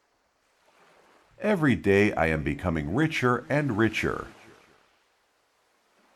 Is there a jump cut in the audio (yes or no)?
yes